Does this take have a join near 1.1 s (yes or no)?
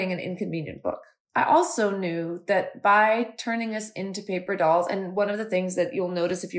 yes